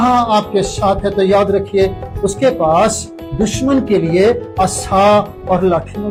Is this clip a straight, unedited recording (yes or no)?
yes